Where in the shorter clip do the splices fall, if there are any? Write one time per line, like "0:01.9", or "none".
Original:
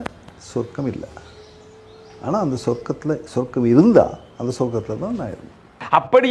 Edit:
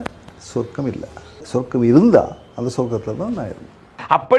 0:01.4